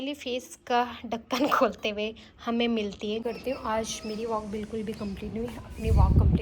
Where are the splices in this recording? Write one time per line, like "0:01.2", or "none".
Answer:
0:03.2

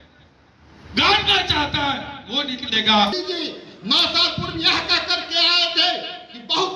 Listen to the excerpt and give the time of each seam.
0:03.1

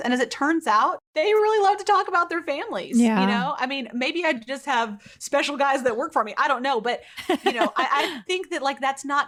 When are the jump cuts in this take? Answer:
none

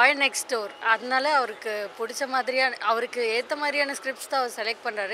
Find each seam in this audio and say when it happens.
none

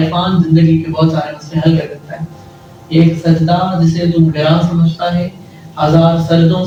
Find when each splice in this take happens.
none

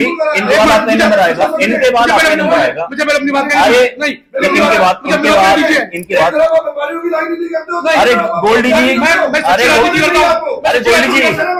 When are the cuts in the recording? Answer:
none

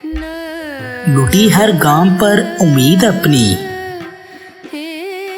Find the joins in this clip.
0:01.0
0:04.2

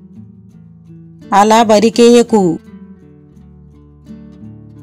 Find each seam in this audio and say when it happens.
none

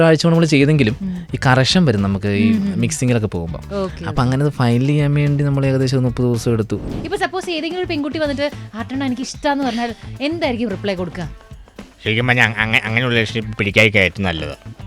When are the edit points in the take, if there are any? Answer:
0:06.9

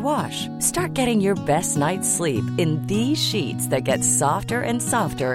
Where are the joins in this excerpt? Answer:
none

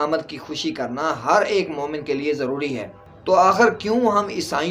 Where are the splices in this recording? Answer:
0:03.1

